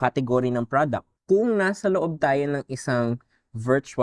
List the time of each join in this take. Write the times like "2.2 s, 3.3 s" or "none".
1.1 s